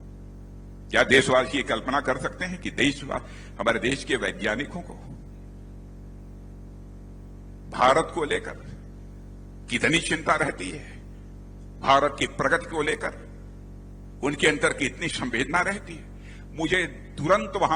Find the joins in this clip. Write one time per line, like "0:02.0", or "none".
0:00.9